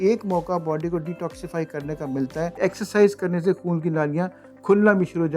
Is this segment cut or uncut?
cut